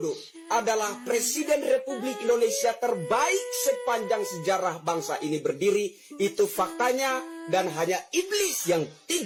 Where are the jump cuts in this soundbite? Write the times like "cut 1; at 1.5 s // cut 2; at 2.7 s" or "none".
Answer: none